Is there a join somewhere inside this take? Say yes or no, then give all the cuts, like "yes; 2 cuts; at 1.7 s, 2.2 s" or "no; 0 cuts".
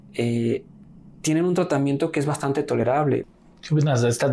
yes; 1 cut; at 3.3 s